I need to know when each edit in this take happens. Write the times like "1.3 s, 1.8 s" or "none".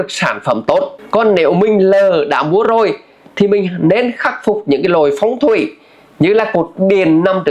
1.0 s